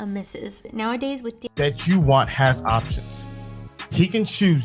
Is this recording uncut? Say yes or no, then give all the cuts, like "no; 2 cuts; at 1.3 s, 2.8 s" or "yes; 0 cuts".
no; 1 cut; at 1.4 s